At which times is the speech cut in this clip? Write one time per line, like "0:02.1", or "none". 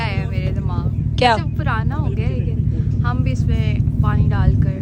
none